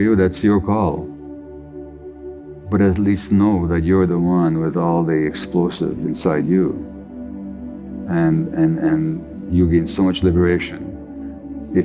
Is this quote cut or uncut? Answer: uncut